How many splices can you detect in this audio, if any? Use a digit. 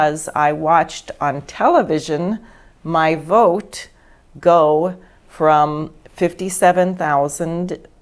0